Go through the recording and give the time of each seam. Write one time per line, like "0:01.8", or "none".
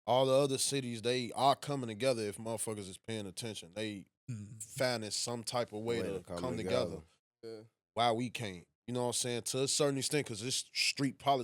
none